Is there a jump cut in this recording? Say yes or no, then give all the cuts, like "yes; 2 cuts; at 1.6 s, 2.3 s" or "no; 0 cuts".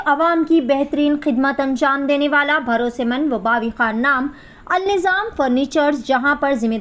no; 0 cuts